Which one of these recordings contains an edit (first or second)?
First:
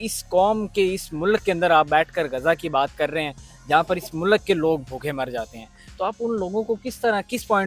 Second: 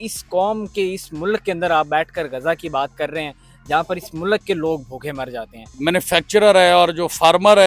second